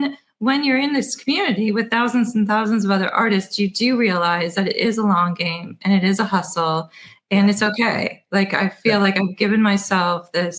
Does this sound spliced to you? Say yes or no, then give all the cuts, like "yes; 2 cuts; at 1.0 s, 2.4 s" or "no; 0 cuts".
no; 0 cuts